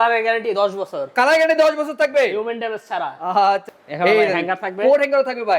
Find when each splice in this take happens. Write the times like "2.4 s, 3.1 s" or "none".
3.7 s